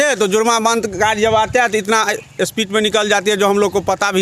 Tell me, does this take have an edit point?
no; 0 cuts

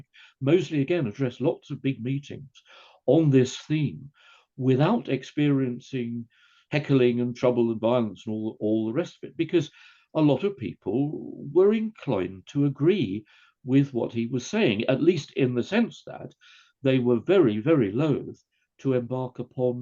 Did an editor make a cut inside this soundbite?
no; 0 cuts

